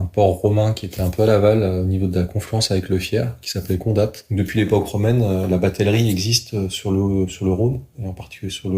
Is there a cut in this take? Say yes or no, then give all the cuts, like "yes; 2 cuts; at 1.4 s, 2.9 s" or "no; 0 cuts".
yes; 1 cut; at 4.2 s